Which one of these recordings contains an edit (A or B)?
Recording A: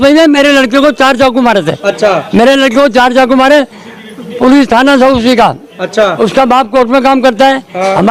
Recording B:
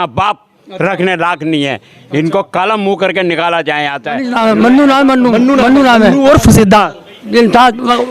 B